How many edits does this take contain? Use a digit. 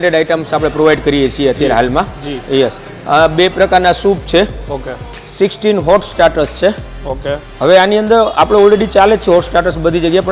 0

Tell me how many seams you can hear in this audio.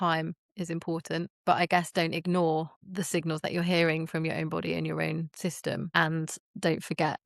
3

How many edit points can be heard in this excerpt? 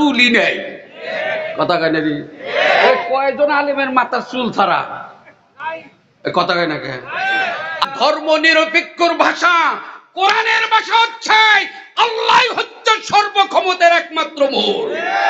1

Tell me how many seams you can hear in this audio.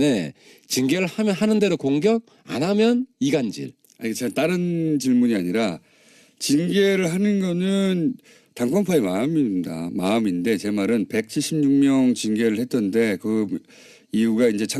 1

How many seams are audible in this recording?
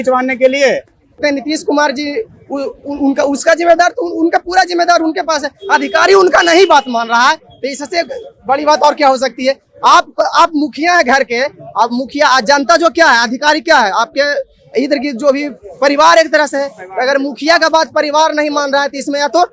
1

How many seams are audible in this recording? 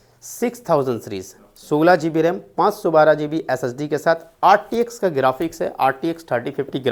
0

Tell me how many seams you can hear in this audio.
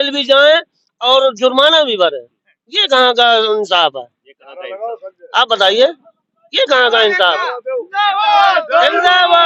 0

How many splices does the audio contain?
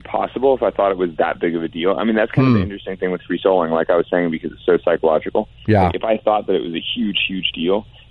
0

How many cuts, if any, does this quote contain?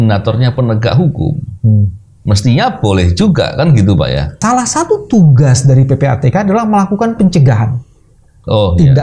1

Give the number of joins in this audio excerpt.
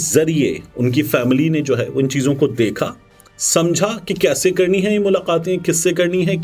0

